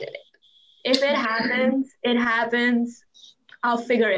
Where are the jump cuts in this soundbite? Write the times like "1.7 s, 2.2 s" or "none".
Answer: 3.1 s